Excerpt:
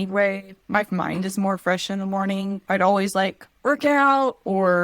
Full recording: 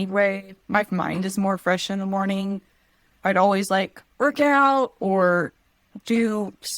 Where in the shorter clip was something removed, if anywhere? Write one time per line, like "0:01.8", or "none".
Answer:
0:02.6